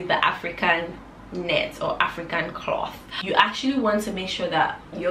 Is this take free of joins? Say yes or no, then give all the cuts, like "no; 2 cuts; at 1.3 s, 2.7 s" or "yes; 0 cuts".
no; 1 cut; at 3.1 s